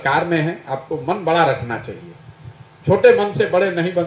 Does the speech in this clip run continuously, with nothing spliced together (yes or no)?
yes